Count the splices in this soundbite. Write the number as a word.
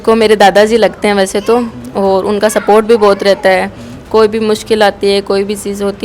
zero